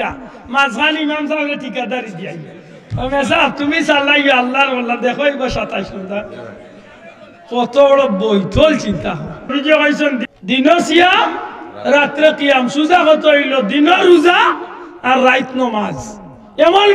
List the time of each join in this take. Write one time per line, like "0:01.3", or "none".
0:09.5
0:10.3